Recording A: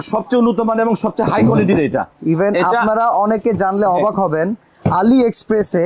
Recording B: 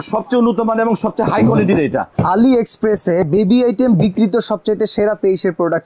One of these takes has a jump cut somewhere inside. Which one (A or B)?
B